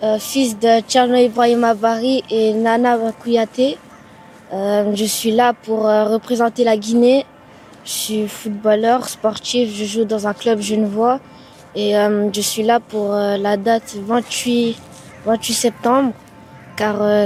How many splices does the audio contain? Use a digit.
0